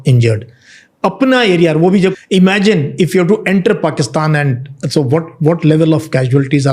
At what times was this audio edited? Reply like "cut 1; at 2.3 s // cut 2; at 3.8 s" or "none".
cut 1; at 2.1 s

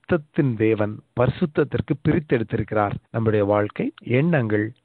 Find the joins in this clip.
cut 1; at 3.0 s // cut 2; at 4.0 s

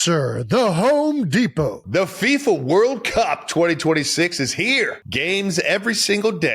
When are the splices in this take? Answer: cut 1; at 1.8 s // cut 2; at 5.0 s

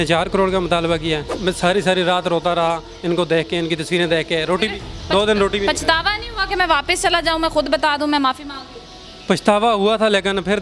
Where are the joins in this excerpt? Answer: cut 1; at 1.3 s

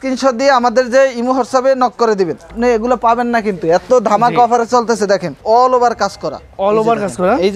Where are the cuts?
cut 1; at 2.5 s // cut 2; at 5.4 s

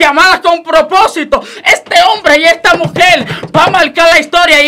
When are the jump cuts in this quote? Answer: none

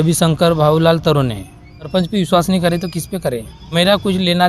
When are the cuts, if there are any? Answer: cut 1; at 1.9 s // cut 2; at 3.7 s

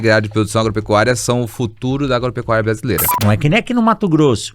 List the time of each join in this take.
cut 1; at 3.1 s

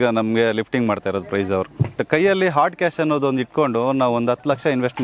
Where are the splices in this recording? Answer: cut 1; at 2.0 s

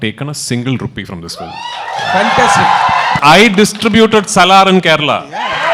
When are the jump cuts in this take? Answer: cut 1; at 3.1 s

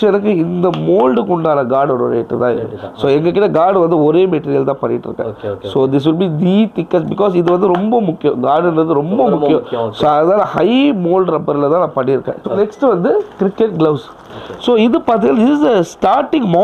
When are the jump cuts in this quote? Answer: cut 1; at 12.4 s

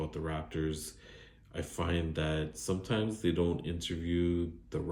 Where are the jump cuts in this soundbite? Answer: none

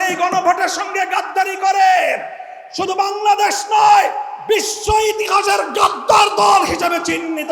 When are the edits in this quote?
none

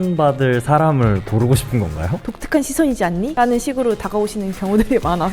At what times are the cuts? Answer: cut 1; at 2.2 s // cut 2; at 3.3 s

